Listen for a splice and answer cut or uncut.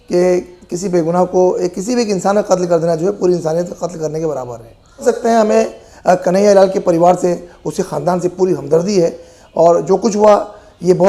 cut